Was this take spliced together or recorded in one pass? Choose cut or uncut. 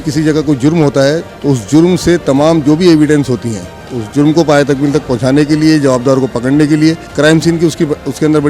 cut